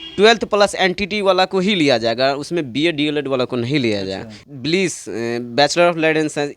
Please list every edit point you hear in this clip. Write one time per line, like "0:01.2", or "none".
0:04.5